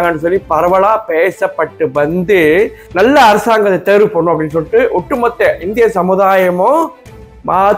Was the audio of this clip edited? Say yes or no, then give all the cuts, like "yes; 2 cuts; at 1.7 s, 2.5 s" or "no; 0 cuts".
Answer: yes; 1 cut; at 2.8 s